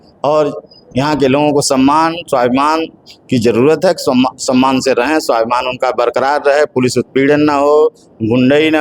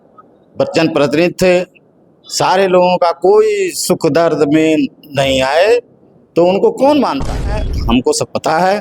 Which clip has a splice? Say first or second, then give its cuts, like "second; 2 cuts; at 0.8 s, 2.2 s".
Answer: second; 1 cut; at 7.6 s